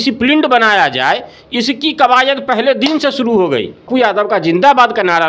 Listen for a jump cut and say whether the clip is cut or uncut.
cut